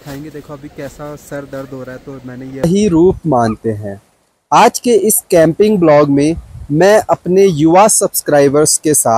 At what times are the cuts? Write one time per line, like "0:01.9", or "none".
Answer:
0:02.6